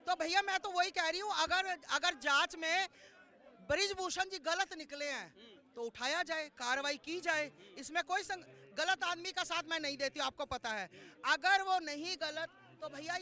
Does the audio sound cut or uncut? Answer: uncut